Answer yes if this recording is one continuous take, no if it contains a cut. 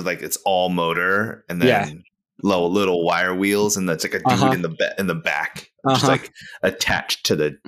yes